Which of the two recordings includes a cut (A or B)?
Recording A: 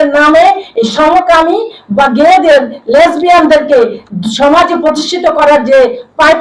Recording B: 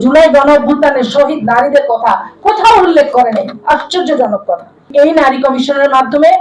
B